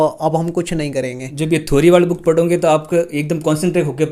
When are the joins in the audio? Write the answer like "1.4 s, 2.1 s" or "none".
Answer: 1.3 s